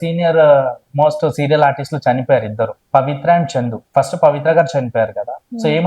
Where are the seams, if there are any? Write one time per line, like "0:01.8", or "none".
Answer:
0:02.8
0:03.8